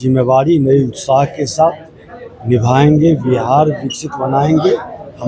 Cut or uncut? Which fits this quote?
uncut